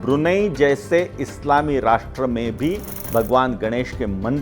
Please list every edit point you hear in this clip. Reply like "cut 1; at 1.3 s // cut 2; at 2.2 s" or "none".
cut 1; at 2.9 s